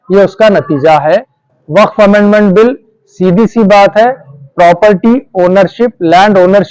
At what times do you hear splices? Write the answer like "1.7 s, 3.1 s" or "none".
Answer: 1.4 s